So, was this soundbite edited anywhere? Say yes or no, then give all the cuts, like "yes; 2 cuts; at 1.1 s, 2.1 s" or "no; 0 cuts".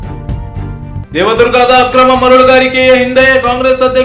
yes; 1 cut; at 1.0 s